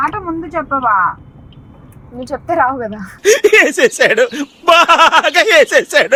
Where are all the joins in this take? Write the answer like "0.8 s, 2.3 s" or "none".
none